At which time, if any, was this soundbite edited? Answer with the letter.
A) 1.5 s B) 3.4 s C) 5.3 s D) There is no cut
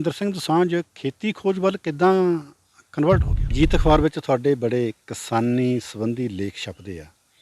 B